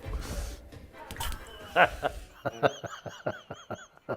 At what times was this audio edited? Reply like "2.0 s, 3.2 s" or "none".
1.6 s